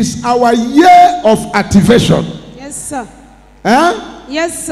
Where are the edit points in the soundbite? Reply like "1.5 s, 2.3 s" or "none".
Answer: none